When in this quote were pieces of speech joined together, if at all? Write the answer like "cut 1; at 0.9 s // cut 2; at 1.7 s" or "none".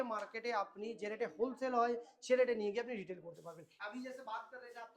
cut 1; at 3.6 s